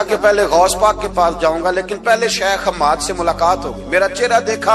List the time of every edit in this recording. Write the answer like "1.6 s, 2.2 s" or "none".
none